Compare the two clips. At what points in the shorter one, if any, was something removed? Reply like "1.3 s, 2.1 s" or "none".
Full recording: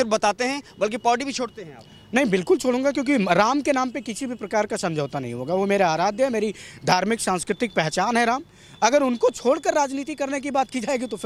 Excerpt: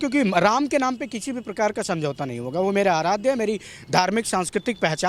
none